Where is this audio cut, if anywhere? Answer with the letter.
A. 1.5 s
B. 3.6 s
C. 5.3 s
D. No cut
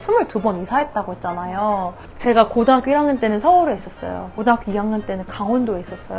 D